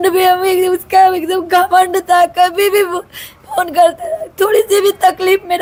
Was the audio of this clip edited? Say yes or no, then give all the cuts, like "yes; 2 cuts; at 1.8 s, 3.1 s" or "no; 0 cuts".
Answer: no; 0 cuts